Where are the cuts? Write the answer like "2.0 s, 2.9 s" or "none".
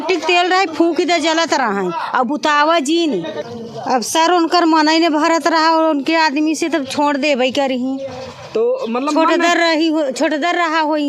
3.4 s